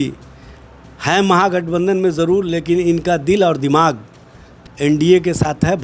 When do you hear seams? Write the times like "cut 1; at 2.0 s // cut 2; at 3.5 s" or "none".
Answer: none

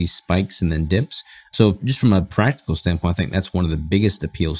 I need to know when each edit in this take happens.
cut 1; at 1.5 s

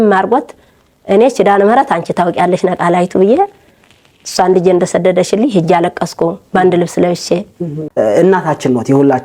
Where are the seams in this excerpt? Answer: cut 1; at 7.8 s

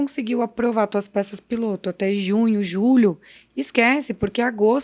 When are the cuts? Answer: none

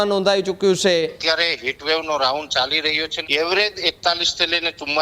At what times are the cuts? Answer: cut 1; at 1.2 s // cut 2; at 3.1 s

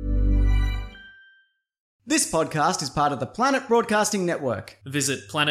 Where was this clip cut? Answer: cut 1; at 2.0 s

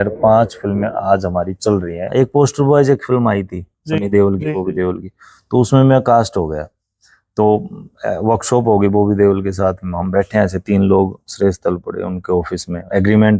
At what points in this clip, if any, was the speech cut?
cut 1; at 2.1 s

